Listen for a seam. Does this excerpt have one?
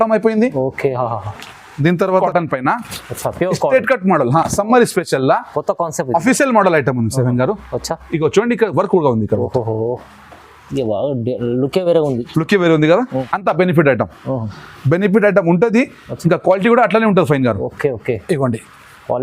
yes; 2 cuts; at 2.2 s, 13.3 s

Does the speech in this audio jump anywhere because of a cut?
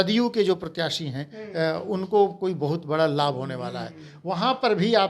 no; 0 cuts

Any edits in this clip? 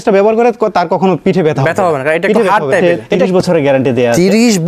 yes; 1 cut; at 2.8 s

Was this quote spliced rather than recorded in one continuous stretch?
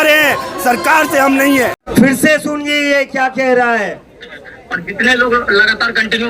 yes; 1 cut; at 1.8 s

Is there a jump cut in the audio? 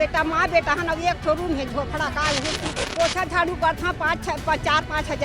yes; 1 cut; at 2.8 s

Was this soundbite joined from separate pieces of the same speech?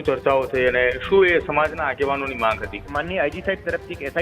yes; 1 cut; at 2.9 s

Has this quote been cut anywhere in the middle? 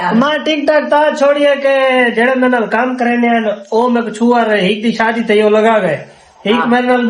no; 0 cuts

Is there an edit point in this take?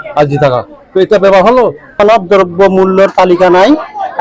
yes; 1 cut; at 1.8 s

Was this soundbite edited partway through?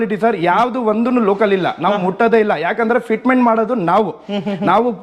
no; 0 cuts

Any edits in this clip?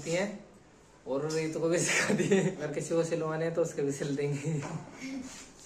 yes; 1 cut; at 2.6 s

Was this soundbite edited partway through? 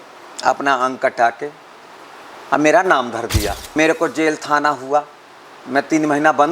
yes; 1 cut; at 3.6 s

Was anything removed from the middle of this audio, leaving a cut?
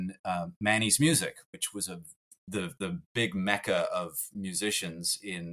no; 0 cuts

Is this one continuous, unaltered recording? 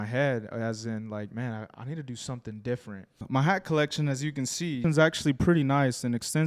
no; 2 cuts; at 3.2 s, 4.8 s

